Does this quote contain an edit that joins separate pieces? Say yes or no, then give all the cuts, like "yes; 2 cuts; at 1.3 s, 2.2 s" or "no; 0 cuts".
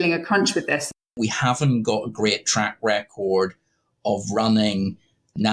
yes; 1 cut; at 0.9 s